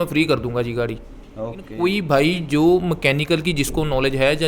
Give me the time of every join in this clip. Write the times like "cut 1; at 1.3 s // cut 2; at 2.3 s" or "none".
cut 1; at 1.7 s